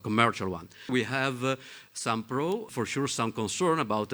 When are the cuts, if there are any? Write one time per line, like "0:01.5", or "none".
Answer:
0:00.9
0:02.7

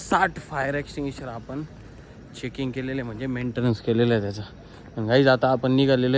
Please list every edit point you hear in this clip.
none

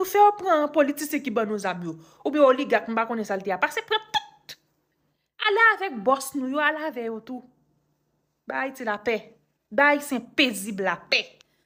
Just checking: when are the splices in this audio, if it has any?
none

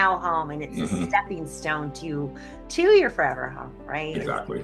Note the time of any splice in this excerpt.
none

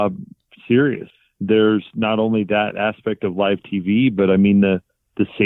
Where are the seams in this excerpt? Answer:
0:01.1

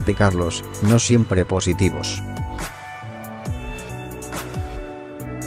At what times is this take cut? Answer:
0:02.0

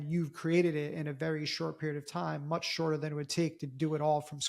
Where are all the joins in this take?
none

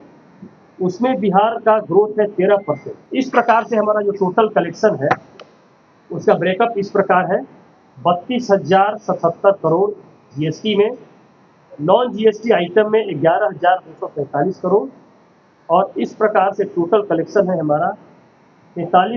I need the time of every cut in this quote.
0:02.9

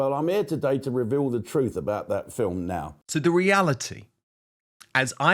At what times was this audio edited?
0:03.0

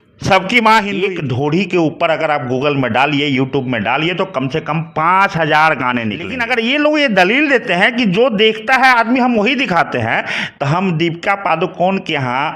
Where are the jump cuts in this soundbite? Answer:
0:01.2
0:06.4

